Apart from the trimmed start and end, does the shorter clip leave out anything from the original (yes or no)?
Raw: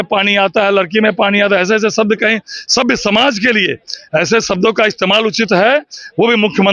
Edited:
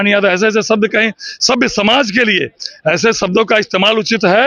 no